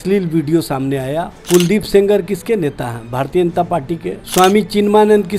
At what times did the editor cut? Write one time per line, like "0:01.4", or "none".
0:01.4
0:04.2